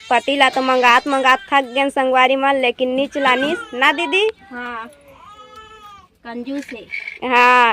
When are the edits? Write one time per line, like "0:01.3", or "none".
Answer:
none